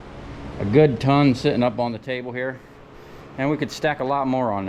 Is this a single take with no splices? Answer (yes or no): yes